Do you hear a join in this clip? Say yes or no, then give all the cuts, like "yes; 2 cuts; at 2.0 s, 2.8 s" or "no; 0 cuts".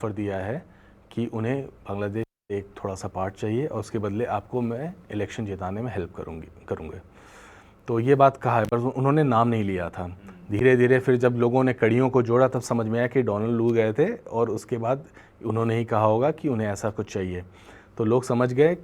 no; 0 cuts